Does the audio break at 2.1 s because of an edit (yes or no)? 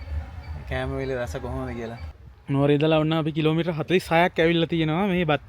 yes